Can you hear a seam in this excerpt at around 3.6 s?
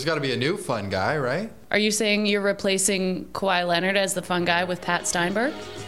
no; 1 cut; at 1.6 s

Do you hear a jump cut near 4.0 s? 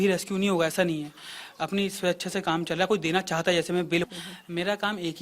yes; 1 cut; at 4.0 s

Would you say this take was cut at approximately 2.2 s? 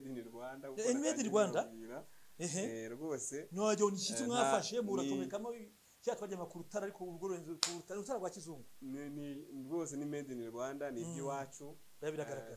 no; 0 cuts

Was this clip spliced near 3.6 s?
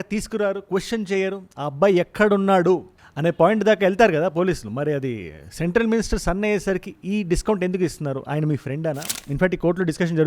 no; 1 cut; at 9.1 s

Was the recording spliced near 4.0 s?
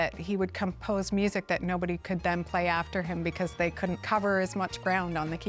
yes; 1 cut; at 4.0 s

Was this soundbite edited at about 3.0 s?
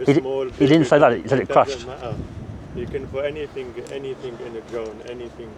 no; 0 cuts

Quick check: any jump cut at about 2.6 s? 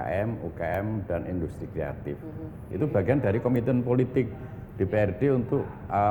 yes; 1 cut; at 2.6 s

